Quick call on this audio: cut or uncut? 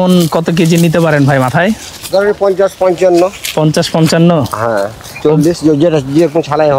uncut